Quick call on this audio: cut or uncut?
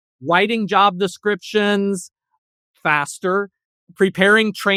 uncut